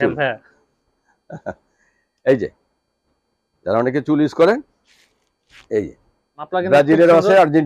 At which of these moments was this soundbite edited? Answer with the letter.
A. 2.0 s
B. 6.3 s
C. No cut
B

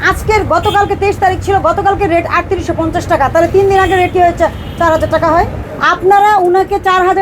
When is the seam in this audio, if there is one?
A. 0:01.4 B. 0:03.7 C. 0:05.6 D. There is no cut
C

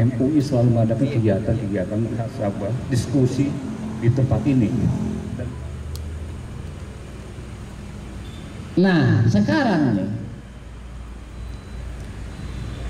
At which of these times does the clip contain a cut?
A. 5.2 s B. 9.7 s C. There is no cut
A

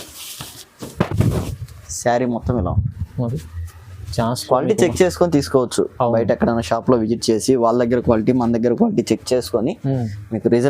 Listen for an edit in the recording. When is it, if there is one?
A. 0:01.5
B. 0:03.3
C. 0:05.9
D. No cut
B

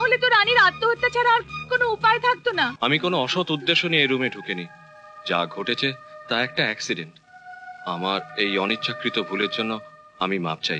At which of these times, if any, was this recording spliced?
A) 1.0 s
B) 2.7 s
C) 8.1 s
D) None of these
B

